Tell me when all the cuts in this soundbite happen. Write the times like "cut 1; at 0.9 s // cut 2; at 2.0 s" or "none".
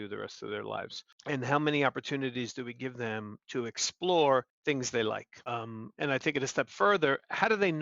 cut 1; at 1.0 s // cut 2; at 4.5 s // cut 3; at 5.3 s